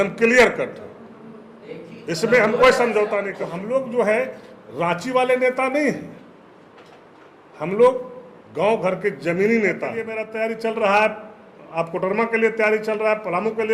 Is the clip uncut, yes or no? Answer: no